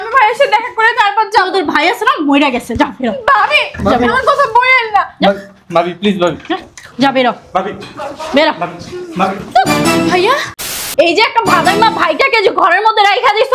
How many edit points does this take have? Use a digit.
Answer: 1